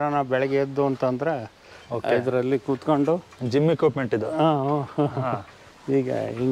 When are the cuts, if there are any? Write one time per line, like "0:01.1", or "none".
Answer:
none

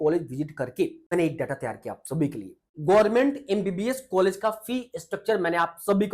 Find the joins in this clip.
0:01.1
0:02.7

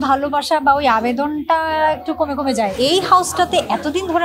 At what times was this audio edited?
0:02.7

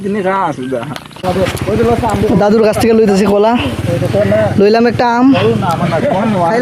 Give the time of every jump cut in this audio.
0:01.1

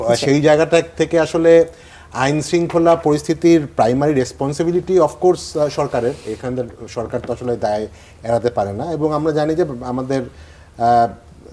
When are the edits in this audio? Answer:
none

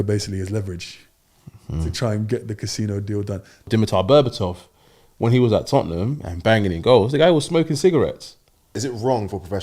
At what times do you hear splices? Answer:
0:03.7
0:08.7

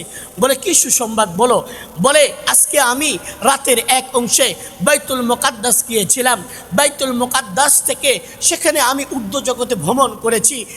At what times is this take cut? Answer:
none

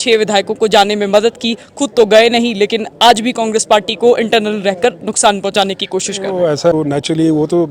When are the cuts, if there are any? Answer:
0:06.7

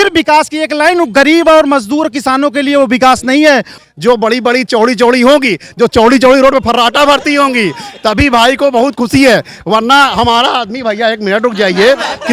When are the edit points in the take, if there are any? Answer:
0:03.7

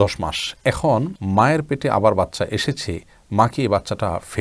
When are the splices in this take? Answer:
0:01.2

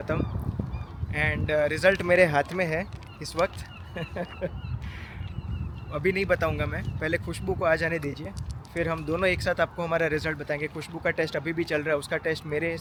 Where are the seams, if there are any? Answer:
none

